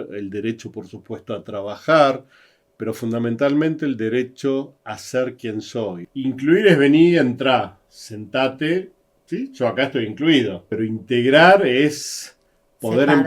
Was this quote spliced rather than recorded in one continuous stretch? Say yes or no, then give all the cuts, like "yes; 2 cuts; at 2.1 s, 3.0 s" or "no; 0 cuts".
yes; 2 cuts; at 6.0 s, 10.6 s